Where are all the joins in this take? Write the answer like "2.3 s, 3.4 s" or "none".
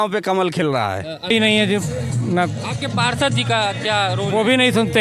1.3 s